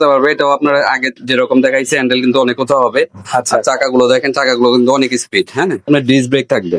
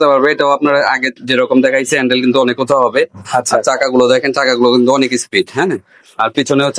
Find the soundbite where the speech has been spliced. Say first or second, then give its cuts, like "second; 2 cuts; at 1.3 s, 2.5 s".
first; 1 cut; at 5.9 s